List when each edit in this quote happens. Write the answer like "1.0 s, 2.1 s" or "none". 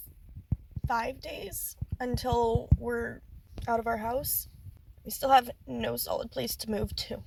none

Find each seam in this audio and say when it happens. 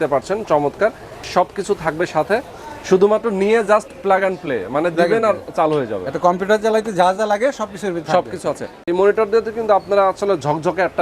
8.8 s

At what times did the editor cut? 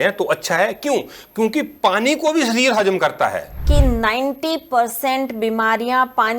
3.7 s

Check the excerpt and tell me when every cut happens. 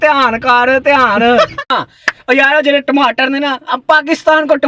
1.6 s

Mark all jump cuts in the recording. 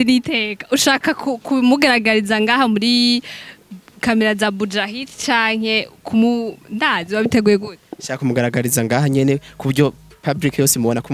none

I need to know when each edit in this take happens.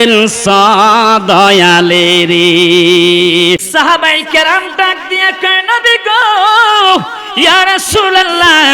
3.7 s

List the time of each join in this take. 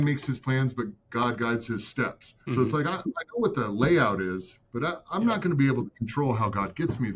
2.3 s

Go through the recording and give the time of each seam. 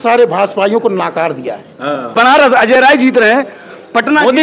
2.1 s

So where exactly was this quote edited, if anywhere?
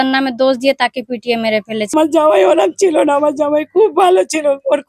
1.9 s

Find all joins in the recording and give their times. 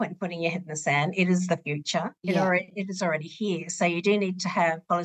none

